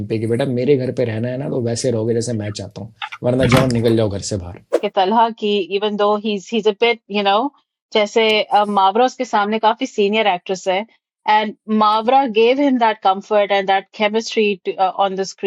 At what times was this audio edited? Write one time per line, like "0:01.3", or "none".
0:04.8